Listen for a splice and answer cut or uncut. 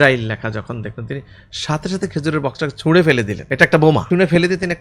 cut